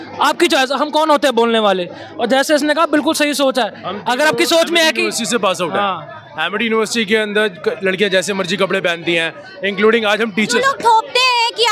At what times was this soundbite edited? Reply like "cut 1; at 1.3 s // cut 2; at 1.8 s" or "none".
none